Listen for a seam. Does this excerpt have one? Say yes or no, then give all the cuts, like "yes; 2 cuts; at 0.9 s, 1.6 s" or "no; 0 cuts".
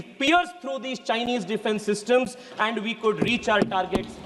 no; 0 cuts